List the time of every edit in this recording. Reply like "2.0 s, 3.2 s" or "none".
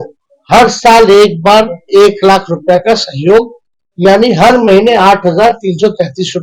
none